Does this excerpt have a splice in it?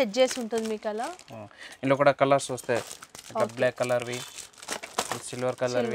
no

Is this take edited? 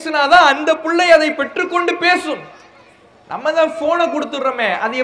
no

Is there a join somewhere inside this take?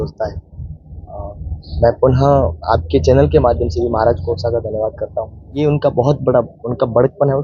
yes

